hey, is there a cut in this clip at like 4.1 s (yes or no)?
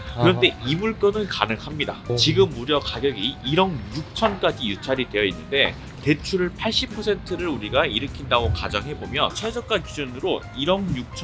no